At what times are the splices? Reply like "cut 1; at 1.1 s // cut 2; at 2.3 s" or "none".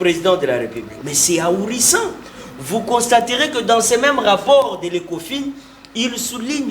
cut 1; at 0.9 s